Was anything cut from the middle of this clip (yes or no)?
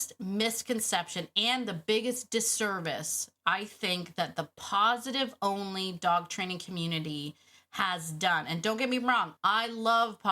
yes